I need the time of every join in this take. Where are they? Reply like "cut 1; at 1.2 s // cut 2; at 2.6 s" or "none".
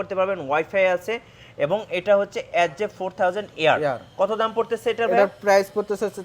none